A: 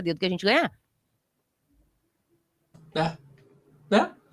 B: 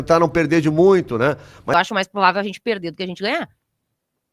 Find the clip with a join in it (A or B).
B